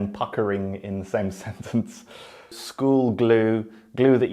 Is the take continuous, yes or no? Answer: no